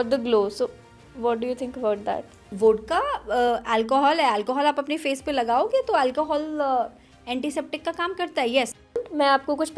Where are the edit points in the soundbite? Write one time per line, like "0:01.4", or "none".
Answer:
0:02.5
0:09.0